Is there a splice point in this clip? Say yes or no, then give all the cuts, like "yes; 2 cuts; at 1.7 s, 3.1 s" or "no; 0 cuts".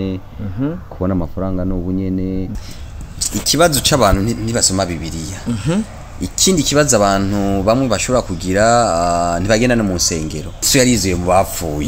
yes; 2 cuts; at 2.5 s, 10.7 s